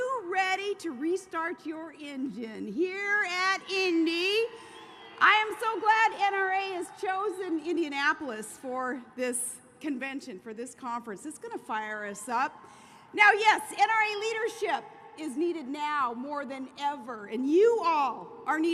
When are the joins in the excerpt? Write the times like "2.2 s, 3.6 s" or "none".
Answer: none